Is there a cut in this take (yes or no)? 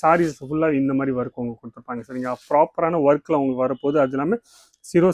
no